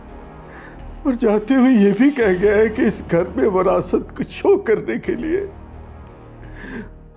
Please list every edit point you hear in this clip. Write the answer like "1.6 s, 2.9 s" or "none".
none